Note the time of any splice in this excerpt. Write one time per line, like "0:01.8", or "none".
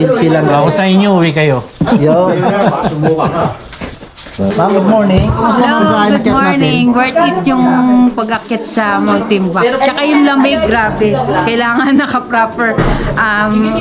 0:04.5